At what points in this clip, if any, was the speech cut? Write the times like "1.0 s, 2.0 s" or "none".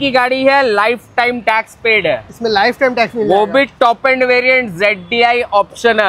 none